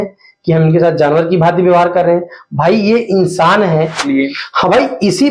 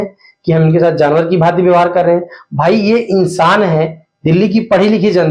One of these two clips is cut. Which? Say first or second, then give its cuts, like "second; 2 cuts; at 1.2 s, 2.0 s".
first; 1 cut; at 4.0 s